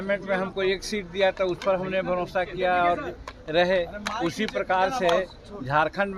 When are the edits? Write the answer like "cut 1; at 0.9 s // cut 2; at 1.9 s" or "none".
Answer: none